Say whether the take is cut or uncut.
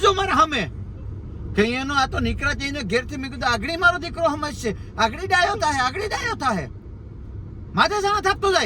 uncut